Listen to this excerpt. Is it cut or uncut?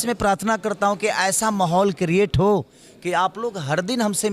uncut